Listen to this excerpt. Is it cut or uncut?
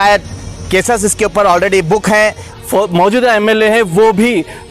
cut